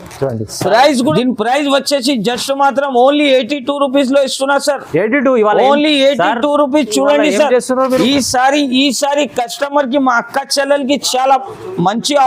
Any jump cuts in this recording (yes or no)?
yes